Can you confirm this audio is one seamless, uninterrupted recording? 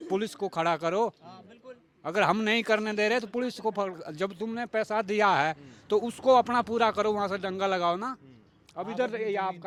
yes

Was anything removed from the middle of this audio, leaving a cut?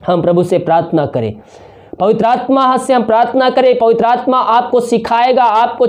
no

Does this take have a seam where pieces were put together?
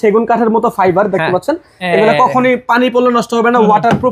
no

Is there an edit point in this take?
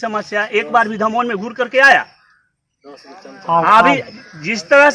no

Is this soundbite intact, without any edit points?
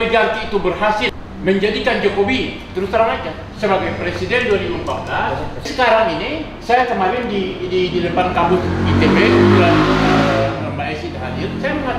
no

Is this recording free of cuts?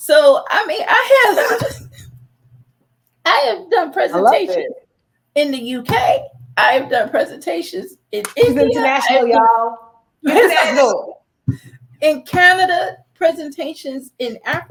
yes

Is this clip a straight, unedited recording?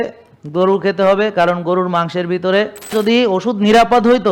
no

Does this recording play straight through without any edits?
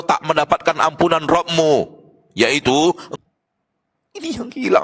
no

